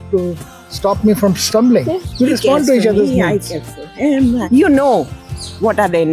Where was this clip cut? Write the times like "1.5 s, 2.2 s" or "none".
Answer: 2.1 s, 4.5 s